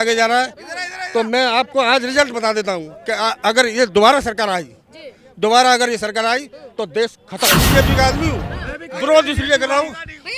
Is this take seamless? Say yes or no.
no